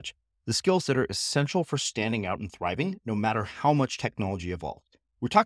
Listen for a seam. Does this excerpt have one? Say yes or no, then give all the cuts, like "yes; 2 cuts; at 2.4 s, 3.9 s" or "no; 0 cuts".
no; 0 cuts